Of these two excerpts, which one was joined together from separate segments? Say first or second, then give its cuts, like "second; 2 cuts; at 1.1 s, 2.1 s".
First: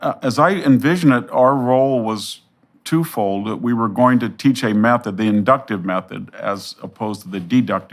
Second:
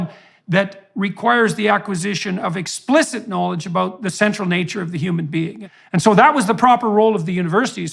second; 1 cut; at 5.6 s